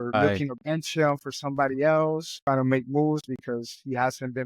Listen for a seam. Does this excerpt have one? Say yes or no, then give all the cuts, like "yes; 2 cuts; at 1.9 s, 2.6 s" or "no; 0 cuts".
yes; 1 cut; at 2.3 s